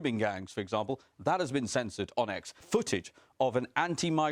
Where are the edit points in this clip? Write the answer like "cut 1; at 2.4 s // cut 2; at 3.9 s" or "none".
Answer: cut 1; at 2.6 s